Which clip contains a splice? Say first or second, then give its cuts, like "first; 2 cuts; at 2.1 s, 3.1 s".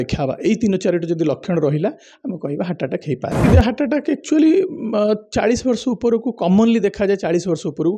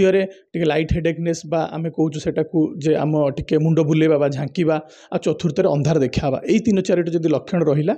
first; 1 cut; at 3.5 s